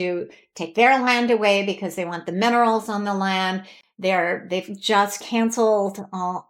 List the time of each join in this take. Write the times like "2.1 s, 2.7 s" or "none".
none